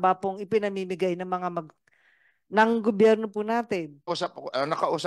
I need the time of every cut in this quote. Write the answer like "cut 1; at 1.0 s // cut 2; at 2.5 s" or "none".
cut 1; at 4.1 s